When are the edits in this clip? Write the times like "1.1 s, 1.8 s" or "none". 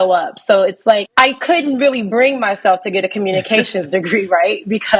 1.1 s